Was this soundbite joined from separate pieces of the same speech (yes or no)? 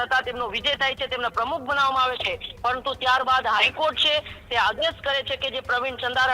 no